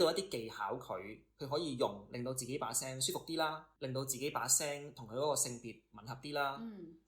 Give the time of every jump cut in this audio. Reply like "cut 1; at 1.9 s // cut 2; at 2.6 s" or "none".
cut 1; at 3.7 s